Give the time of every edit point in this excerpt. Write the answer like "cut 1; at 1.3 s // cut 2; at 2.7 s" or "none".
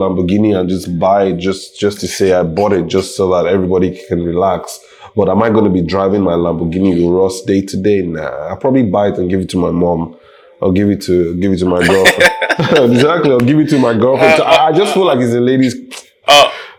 none